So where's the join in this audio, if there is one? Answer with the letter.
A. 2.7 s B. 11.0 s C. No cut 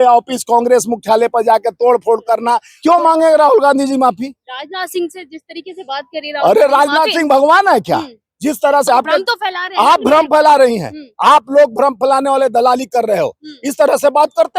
A